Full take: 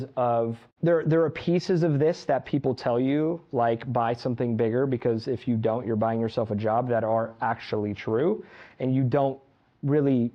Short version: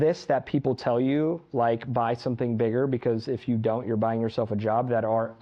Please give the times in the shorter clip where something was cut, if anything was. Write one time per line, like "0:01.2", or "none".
none